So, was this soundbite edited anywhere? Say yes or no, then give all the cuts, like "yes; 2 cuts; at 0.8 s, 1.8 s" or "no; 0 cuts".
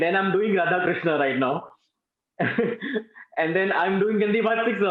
no; 0 cuts